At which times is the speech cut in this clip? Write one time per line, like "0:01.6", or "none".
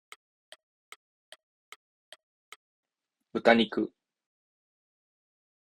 0:02.7